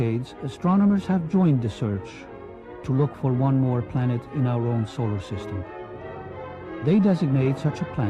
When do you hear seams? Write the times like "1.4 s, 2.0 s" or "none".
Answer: none

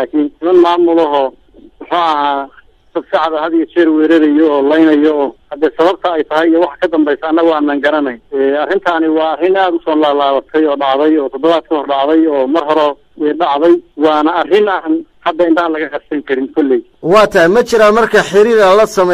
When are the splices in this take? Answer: 2.0 s

